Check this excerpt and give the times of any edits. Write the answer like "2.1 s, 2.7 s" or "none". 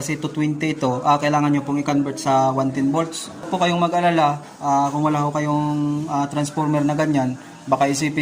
3.5 s